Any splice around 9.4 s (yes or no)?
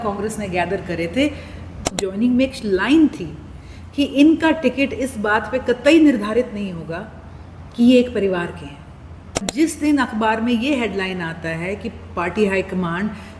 yes